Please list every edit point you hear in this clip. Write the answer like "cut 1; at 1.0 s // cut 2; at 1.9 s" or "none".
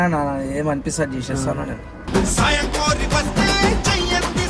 none

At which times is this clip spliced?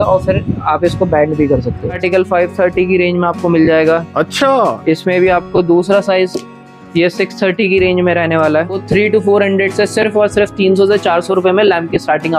cut 1; at 1.9 s // cut 2; at 8.8 s

